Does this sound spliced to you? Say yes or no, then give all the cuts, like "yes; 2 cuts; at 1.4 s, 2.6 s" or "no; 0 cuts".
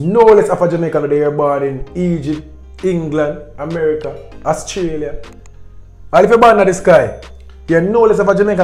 no; 0 cuts